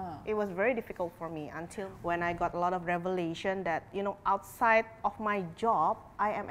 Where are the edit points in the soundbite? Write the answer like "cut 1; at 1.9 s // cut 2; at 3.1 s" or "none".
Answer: cut 1; at 1.8 s